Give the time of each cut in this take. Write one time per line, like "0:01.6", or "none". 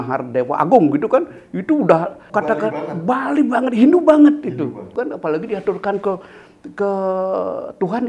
0:02.2
0:04.9